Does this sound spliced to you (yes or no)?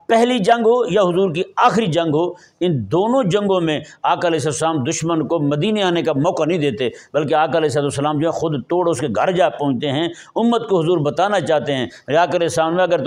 no